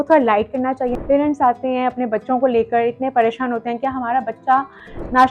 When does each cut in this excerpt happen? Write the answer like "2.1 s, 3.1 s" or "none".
1.0 s